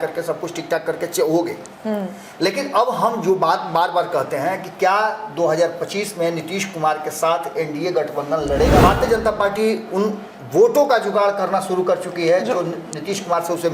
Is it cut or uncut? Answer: cut